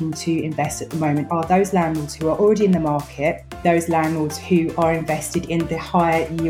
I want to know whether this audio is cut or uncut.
cut